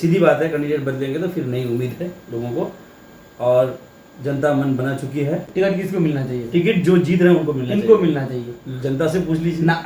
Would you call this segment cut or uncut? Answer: cut